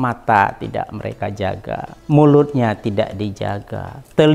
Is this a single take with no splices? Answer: no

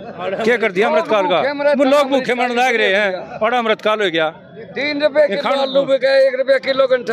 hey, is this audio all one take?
yes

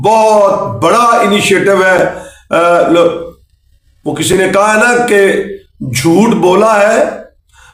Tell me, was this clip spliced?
no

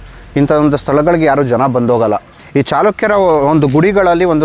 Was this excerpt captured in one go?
no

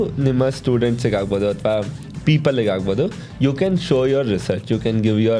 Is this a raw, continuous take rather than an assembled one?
yes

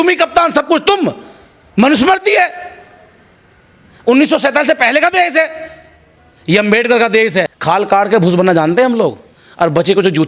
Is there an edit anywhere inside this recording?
yes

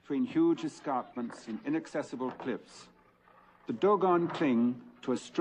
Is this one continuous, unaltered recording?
no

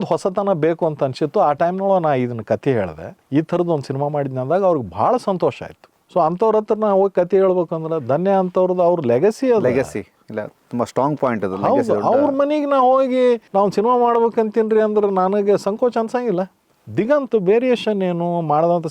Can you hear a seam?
yes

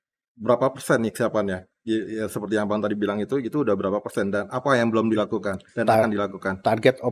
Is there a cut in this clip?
no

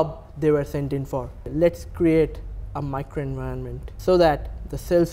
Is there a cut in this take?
yes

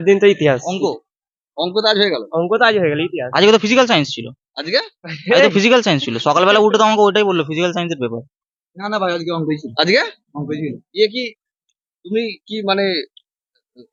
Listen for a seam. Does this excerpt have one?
no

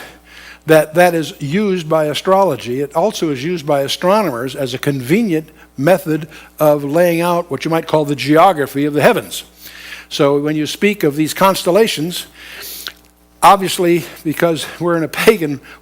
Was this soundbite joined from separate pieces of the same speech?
yes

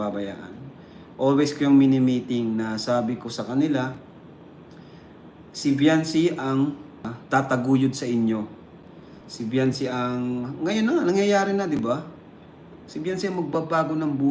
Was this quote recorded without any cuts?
no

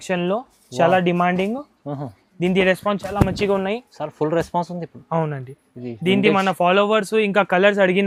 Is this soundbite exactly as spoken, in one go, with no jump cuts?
yes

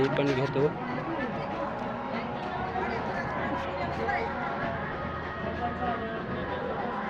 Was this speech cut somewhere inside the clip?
no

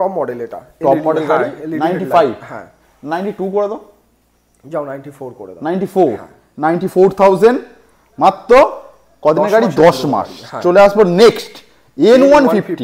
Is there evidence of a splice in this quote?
no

